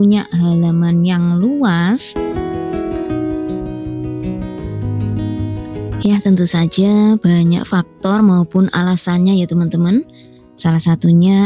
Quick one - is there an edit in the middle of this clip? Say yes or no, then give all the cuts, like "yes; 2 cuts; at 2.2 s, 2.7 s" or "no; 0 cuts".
no; 0 cuts